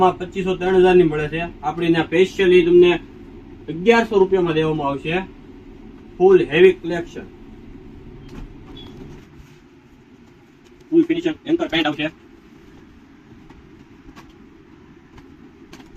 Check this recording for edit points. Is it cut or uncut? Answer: uncut